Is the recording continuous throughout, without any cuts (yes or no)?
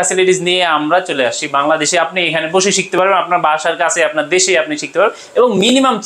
yes